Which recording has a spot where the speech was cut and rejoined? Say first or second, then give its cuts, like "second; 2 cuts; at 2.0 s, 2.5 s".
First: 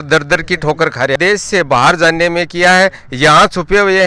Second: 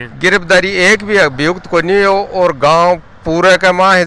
first; 1 cut; at 1.2 s